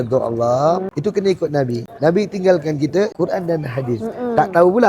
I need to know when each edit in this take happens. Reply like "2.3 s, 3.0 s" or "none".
0.9 s, 1.8 s, 3.1 s

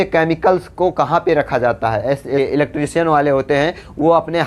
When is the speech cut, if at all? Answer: 2.4 s

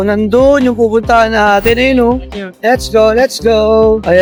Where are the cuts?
none

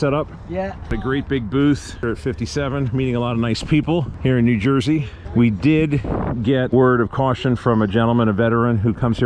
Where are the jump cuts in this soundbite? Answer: 1.0 s, 2.0 s, 4.1 s, 5.2 s, 6.7 s

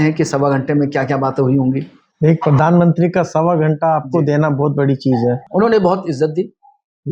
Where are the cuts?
none

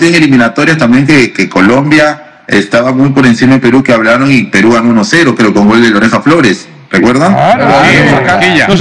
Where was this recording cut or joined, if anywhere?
none

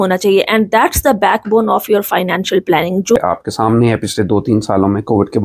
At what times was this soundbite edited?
3.2 s

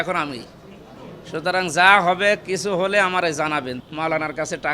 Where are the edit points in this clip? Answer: 3.7 s

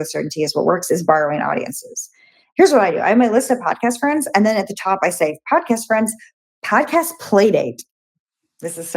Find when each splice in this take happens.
2.4 s

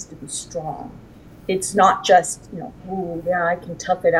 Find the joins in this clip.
none

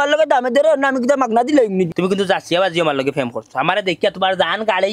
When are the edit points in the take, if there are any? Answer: 1.9 s

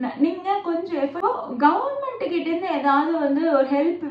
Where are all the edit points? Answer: 1.2 s

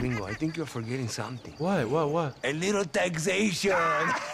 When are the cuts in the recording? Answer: none

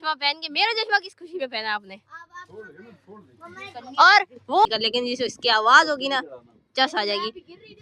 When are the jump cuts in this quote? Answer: 4.6 s

